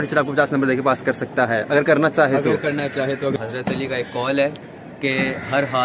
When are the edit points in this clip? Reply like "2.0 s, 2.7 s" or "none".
3.4 s